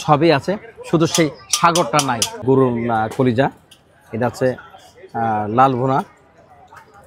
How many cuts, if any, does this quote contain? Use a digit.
1